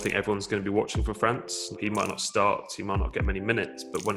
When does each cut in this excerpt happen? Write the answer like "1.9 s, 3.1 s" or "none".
1.7 s